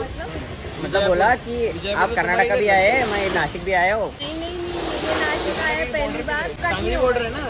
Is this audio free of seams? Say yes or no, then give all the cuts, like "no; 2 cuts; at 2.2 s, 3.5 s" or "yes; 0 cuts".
no; 2 cuts; at 4.2 s, 6.6 s